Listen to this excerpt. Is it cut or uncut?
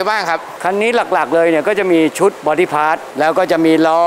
cut